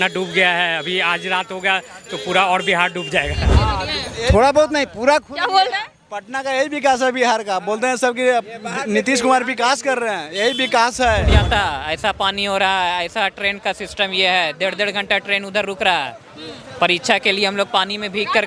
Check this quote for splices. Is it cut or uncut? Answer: cut